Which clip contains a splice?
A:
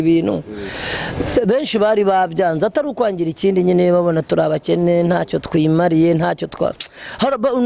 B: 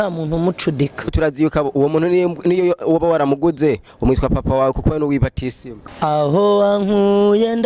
B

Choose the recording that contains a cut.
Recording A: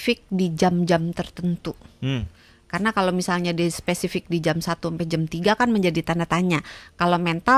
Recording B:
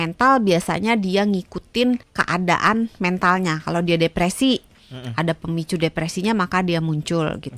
B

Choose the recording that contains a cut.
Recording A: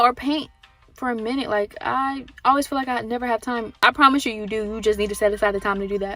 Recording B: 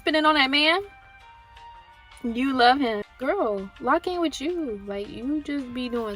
B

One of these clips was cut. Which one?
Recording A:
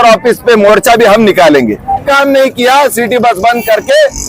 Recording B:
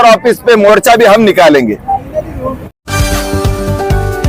A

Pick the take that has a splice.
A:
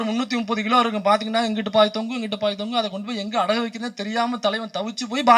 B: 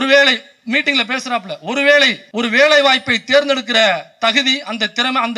B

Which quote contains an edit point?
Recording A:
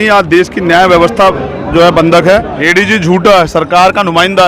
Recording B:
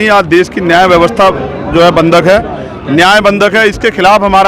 A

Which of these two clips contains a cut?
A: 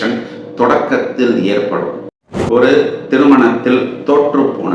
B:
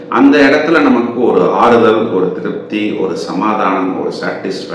A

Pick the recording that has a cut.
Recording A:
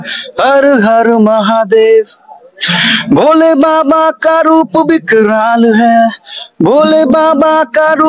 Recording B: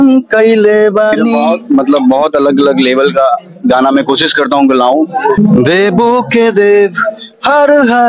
B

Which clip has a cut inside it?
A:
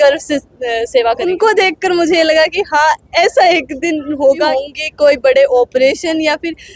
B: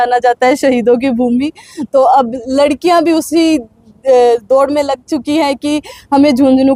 A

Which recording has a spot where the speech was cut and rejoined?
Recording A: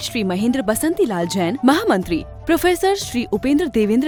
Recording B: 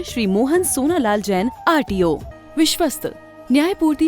B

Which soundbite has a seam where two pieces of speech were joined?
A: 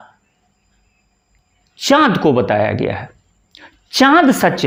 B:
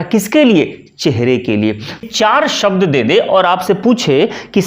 B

